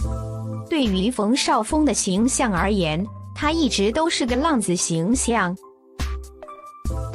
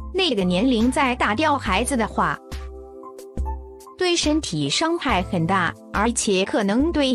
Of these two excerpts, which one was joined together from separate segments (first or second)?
second